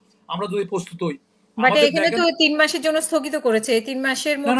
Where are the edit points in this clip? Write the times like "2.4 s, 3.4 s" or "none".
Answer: none